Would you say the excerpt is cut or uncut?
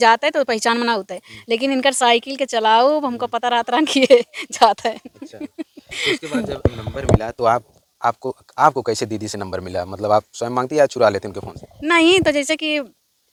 uncut